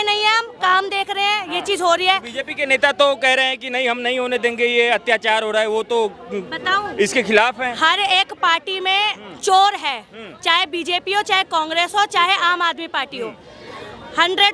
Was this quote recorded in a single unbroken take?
yes; 0 cuts

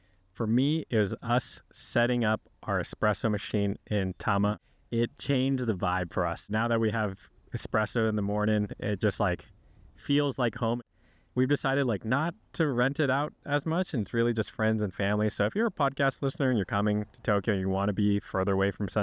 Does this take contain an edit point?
yes; 3 cuts; at 4.7 s, 6.4 s, 10.8 s

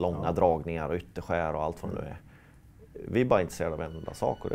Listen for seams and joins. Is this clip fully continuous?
yes; 0 cuts

